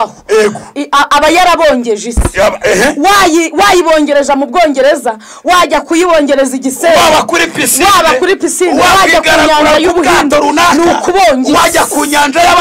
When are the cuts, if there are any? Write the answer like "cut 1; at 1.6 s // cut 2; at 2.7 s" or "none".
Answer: none